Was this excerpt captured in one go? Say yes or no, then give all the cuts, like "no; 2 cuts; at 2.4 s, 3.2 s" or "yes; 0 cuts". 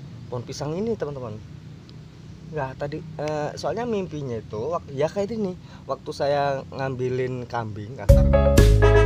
yes; 0 cuts